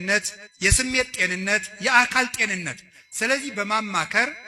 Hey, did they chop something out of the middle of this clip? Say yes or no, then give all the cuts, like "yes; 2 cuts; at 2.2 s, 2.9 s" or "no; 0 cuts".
no; 0 cuts